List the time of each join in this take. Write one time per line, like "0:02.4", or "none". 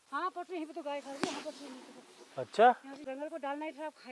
0:03.0